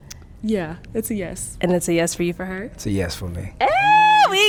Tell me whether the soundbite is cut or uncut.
uncut